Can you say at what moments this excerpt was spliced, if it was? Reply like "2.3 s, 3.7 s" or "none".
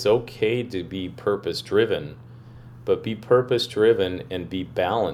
none